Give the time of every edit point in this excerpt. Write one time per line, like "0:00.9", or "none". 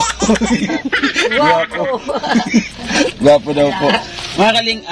none